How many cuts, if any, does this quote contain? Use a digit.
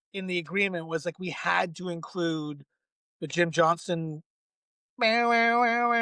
0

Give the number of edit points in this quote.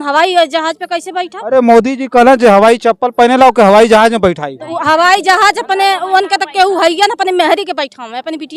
0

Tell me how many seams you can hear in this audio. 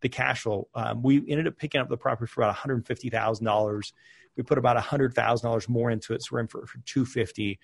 0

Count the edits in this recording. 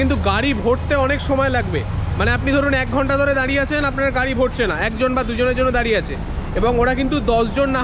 0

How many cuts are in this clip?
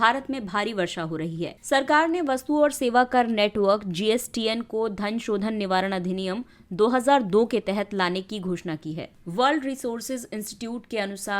2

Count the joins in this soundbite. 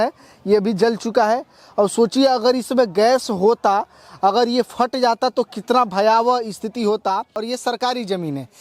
1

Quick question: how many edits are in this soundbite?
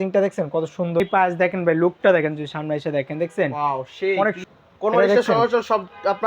2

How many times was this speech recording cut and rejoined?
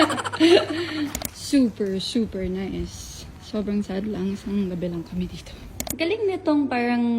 2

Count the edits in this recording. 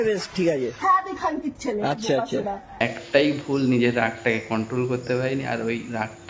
1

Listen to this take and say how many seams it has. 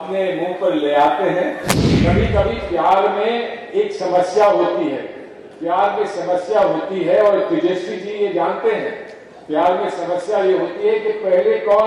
1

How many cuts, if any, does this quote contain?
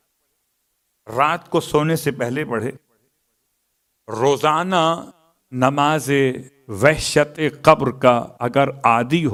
0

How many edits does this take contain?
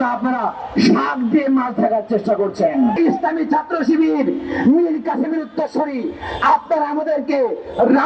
1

